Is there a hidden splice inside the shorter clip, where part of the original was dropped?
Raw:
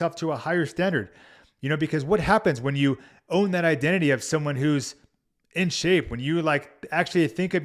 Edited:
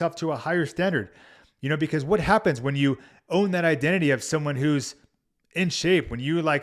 no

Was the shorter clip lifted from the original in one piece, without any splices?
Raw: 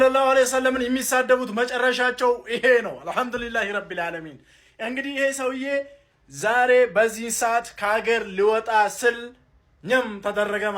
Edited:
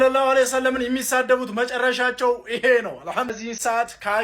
no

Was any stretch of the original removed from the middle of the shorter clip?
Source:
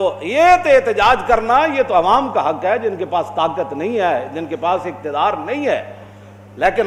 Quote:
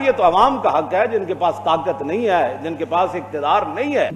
no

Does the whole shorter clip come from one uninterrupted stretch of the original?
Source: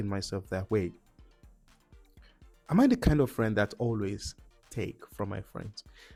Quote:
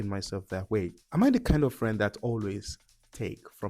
no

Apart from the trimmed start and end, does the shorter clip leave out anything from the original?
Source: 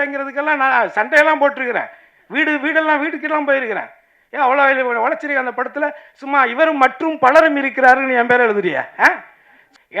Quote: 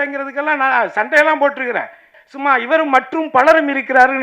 yes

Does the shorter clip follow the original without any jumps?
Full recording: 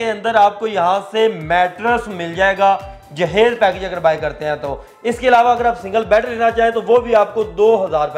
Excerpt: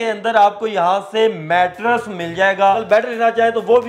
no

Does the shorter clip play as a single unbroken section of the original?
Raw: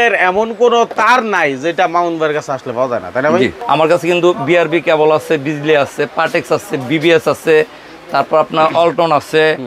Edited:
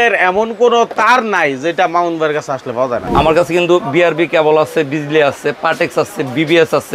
no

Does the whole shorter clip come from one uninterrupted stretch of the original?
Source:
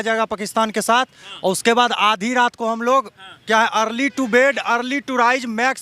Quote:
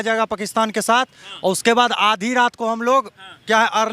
yes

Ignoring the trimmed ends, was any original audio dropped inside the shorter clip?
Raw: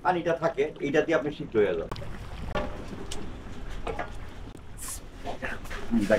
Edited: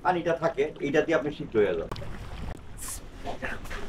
yes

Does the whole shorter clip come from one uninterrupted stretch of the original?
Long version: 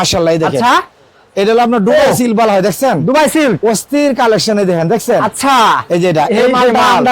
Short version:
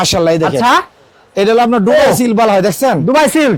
yes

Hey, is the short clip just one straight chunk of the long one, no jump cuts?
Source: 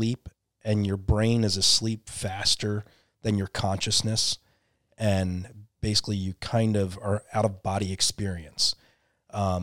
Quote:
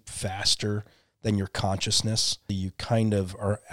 no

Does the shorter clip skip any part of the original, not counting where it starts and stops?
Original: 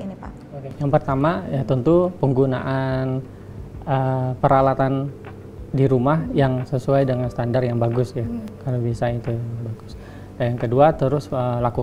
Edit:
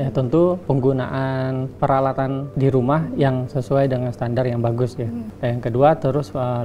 yes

